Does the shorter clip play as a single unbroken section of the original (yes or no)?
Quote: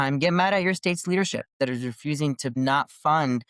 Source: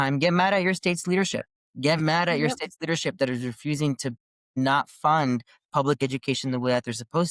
no